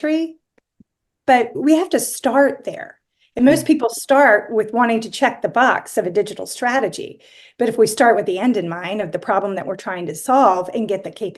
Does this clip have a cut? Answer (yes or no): no